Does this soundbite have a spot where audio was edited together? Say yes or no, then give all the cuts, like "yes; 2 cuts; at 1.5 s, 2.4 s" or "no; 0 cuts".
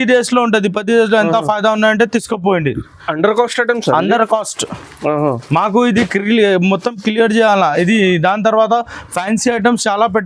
no; 0 cuts